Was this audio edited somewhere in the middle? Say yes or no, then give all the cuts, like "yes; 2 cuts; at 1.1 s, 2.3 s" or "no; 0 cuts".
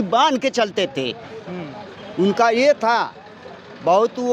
no; 0 cuts